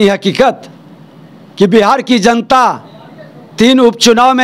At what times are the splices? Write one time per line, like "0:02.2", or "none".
none